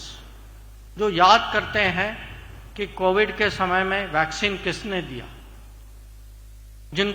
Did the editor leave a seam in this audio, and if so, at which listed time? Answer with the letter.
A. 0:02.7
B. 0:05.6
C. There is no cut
C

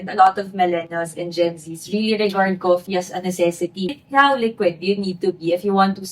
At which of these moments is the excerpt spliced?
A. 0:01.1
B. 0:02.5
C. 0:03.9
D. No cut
C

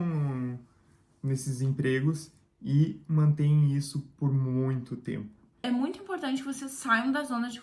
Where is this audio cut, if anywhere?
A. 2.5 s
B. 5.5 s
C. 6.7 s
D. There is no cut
B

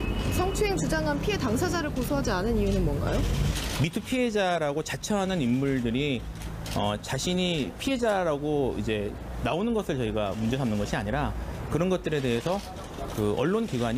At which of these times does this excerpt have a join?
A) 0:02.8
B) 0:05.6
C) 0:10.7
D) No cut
C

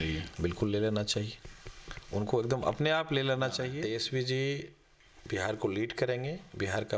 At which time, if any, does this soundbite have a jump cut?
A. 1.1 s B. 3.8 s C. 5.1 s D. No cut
B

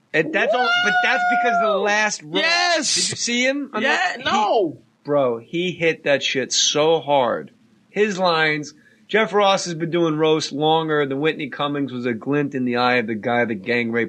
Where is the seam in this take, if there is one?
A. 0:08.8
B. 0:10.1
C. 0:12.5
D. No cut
B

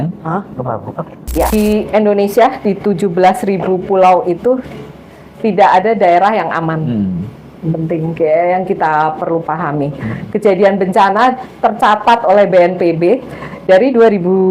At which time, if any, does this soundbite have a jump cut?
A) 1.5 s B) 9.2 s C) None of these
A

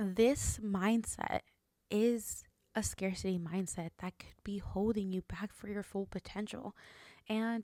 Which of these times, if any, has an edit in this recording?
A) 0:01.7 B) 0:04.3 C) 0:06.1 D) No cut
D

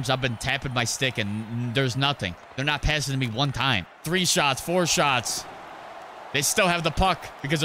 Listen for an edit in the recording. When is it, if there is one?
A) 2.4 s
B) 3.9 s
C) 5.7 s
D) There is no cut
B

